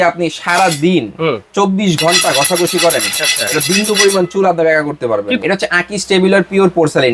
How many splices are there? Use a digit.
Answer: 1